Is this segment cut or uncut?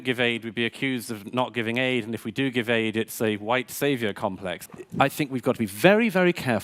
cut